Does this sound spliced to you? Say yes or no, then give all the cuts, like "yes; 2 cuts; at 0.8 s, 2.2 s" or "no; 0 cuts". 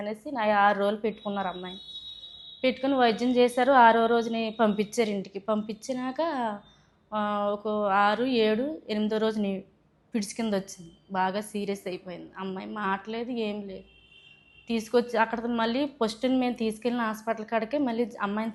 no; 0 cuts